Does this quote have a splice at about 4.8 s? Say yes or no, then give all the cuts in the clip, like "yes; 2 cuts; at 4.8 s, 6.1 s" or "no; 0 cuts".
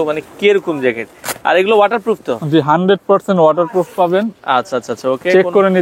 no; 0 cuts